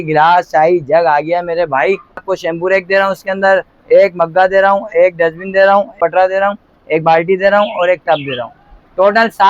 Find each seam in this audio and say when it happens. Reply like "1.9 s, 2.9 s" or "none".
2.3 s, 6.0 s